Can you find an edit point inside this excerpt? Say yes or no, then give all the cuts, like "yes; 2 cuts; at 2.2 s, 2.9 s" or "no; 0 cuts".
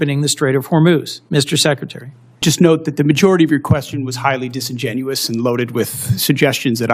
yes; 1 cut; at 2.4 s